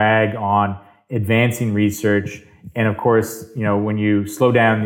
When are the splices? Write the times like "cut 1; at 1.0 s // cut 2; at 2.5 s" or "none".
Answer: none